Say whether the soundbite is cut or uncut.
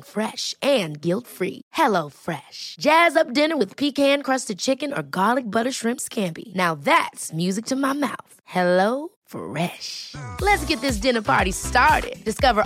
uncut